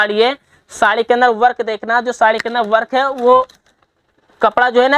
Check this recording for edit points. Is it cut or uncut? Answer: uncut